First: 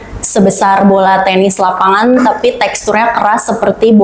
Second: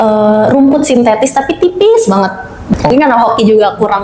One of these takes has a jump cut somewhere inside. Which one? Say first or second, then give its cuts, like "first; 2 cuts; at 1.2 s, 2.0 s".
second; 1 cut; at 2.8 s